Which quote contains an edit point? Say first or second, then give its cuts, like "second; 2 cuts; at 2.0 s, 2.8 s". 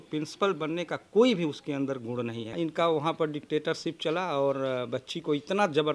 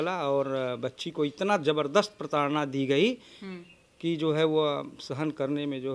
first; 1 cut; at 2.5 s